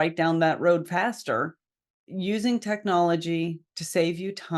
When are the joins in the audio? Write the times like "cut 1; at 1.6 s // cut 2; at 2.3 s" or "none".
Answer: cut 1; at 2.0 s